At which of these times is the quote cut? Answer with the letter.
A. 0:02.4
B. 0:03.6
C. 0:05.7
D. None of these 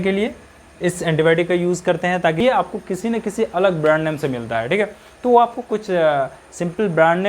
A